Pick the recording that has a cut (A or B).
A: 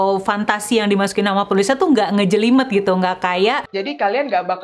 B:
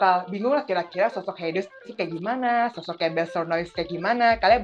A